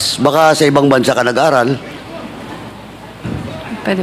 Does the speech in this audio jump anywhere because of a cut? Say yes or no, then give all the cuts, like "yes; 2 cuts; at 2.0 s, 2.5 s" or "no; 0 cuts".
no; 0 cuts